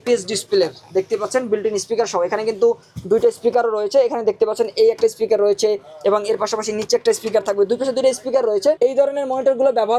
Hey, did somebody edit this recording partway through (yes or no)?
no